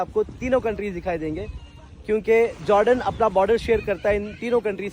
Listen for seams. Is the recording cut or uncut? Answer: uncut